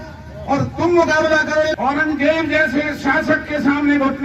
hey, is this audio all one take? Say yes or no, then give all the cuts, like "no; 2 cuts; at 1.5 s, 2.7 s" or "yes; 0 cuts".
no; 1 cut; at 1.7 s